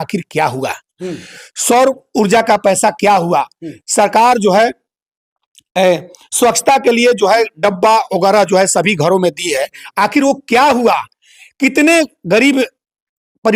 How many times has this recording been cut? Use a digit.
0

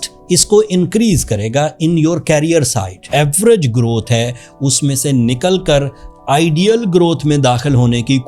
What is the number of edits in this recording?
1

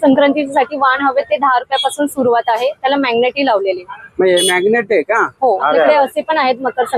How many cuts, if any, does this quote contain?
1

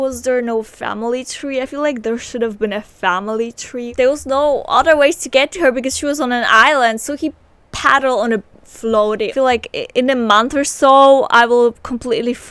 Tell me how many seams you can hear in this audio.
2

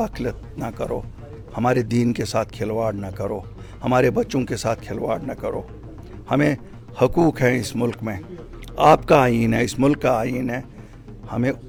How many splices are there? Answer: 0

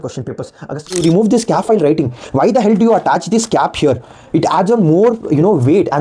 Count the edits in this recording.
1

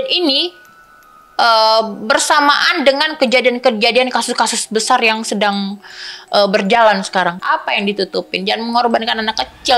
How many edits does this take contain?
1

